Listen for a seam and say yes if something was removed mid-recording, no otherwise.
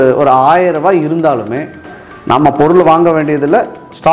yes